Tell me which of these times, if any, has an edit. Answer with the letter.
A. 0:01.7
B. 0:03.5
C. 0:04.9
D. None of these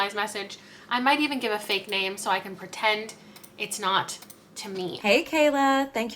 C